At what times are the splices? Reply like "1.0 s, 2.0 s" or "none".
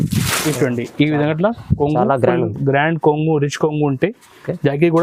none